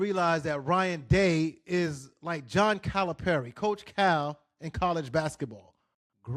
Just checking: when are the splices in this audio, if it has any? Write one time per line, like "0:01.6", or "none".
none